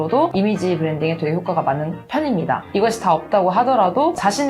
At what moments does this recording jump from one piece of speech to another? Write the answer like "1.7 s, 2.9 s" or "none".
2.7 s